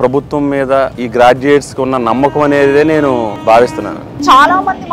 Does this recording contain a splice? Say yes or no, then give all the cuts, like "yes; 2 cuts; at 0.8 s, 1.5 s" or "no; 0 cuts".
yes; 3 cuts; at 1.0 s, 3.4 s, 4.2 s